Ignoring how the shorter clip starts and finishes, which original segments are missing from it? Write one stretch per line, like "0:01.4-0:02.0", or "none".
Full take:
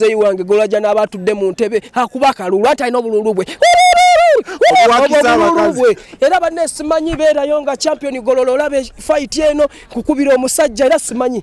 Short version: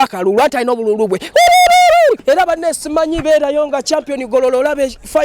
0:04.5-0:06.1